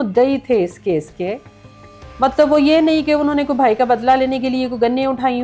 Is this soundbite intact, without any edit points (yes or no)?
yes